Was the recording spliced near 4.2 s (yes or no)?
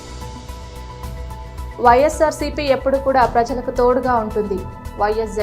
no